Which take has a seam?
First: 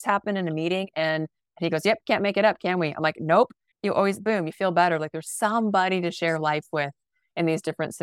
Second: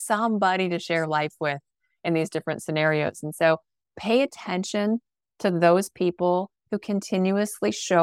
first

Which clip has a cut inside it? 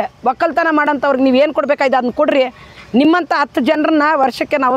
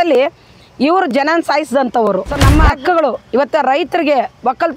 second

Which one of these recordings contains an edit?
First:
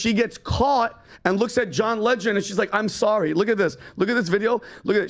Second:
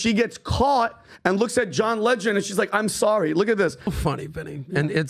second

